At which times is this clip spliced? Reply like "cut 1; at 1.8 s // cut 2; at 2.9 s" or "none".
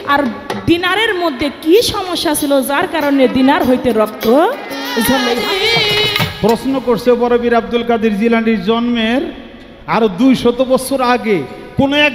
cut 1; at 5.4 s